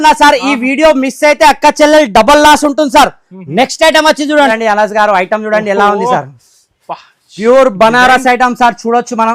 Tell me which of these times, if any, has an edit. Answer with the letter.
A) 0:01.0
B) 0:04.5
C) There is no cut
B